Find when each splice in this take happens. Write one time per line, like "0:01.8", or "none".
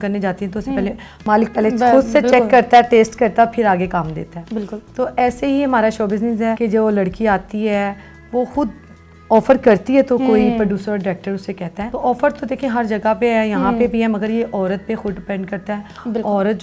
none